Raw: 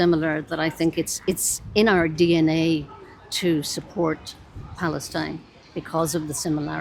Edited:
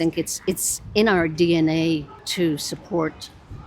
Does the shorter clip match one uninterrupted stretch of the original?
no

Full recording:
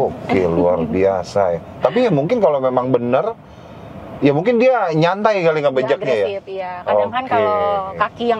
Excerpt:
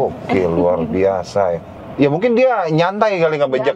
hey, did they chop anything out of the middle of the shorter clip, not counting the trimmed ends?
yes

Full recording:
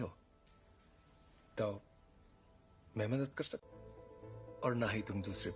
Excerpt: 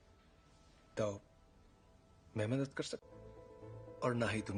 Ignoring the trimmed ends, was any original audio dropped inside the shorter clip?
no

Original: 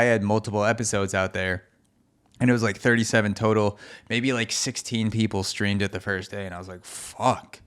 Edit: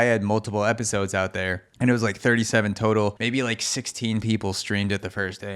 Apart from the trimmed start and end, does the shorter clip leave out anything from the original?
yes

